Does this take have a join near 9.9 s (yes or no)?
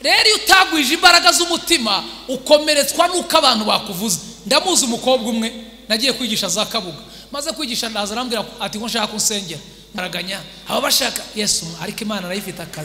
yes